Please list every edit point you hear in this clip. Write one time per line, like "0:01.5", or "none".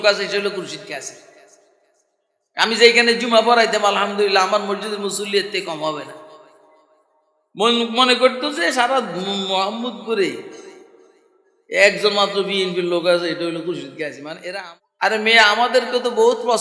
0:14.3